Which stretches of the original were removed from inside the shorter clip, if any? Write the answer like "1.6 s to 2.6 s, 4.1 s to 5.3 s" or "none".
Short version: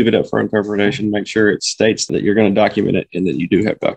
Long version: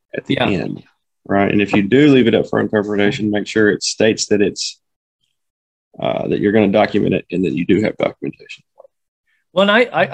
4.2 s to 6.2 s